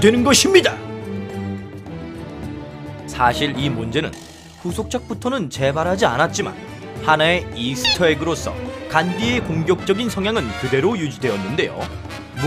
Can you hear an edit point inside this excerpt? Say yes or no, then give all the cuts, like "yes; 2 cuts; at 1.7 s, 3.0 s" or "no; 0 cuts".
no; 0 cuts